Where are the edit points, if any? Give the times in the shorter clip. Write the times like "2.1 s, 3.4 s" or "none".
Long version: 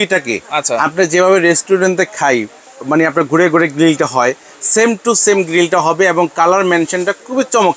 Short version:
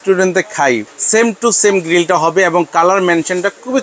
0.9 s